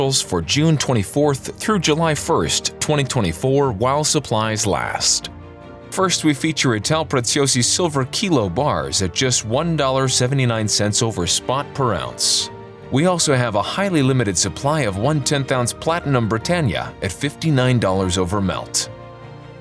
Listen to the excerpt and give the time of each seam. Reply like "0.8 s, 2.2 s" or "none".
none